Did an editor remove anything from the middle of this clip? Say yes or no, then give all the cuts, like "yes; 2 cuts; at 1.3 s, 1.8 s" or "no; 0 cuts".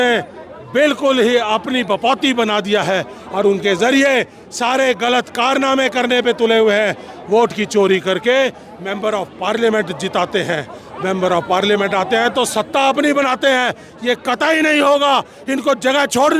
no; 0 cuts